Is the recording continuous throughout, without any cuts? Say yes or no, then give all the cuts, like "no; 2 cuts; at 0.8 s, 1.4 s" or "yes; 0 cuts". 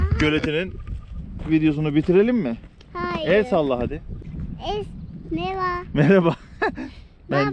no; 1 cut; at 4.2 s